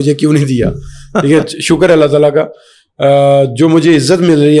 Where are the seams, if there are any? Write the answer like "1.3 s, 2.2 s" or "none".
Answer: none